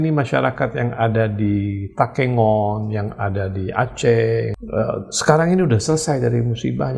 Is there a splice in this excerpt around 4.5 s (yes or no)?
yes